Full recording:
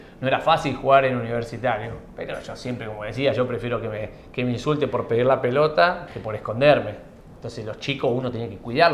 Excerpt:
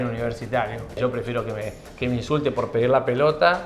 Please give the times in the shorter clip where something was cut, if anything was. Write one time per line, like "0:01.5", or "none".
0:01.0